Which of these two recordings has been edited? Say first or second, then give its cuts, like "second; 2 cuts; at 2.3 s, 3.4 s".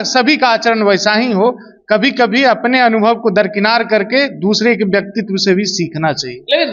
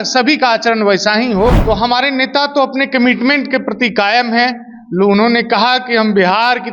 second; 1 cut; at 1.6 s